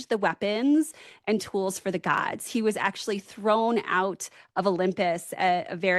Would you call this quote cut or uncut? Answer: uncut